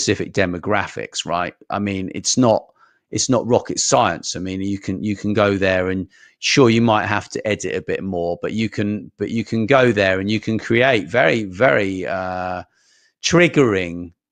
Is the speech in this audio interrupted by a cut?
no; 0 cuts

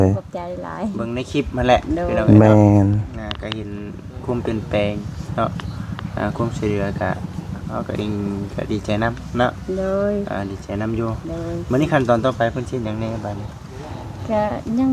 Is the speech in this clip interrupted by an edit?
no; 0 cuts

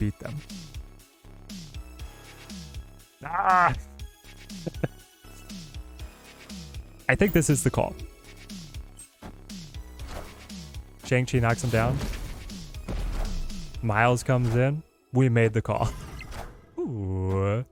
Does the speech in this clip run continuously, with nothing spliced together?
yes; 0 cuts

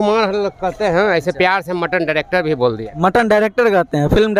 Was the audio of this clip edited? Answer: no; 0 cuts

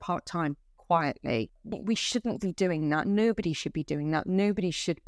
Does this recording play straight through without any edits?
yes; 0 cuts

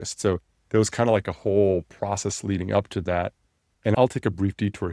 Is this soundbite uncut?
no; 1 cut; at 3.9 s

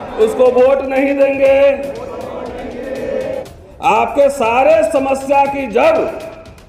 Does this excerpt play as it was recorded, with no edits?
no; 1 cut; at 3.5 s

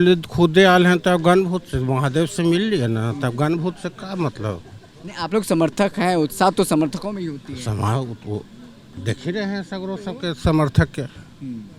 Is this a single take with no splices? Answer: yes; 0 cuts

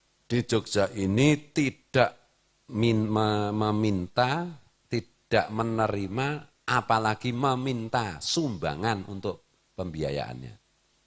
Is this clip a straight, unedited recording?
yes; 0 cuts

